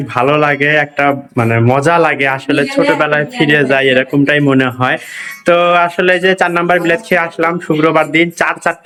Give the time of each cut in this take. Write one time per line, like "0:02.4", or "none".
none